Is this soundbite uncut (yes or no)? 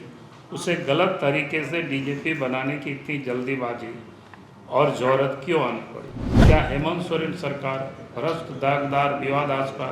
no